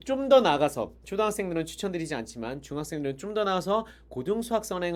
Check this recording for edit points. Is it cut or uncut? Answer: uncut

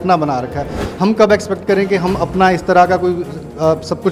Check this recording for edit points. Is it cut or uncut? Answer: uncut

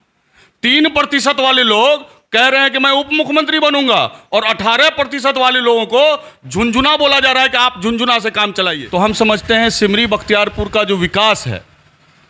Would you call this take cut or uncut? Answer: cut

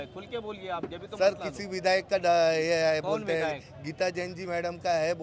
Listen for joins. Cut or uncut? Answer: uncut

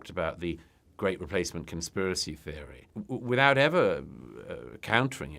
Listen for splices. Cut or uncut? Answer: cut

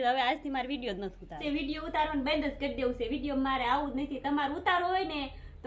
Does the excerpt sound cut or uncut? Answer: cut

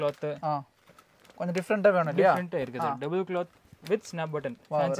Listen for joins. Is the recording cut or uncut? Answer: uncut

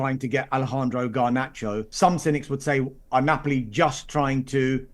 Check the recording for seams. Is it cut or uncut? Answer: cut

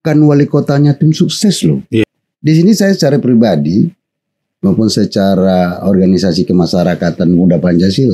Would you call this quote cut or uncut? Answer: cut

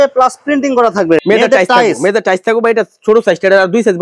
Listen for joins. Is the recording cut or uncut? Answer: cut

